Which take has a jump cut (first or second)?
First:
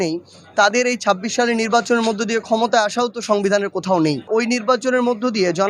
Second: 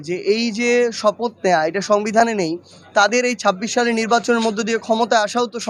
first